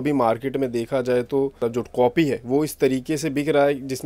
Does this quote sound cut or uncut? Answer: cut